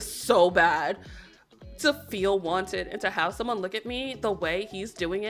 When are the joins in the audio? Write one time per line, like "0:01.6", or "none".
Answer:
none